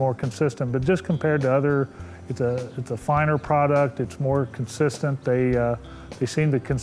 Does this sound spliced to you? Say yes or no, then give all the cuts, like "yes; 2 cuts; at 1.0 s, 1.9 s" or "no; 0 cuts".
no; 0 cuts